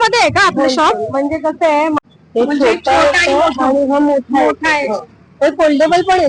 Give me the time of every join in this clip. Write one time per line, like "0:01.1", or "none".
0:02.0